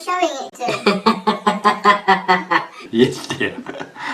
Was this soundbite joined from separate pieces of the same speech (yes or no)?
no